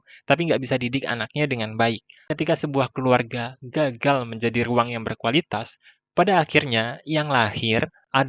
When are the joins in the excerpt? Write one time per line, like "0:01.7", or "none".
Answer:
0:02.2